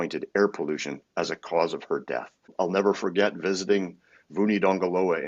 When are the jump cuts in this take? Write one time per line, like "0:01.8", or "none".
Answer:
0:02.5